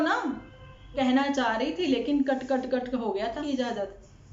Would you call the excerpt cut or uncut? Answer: cut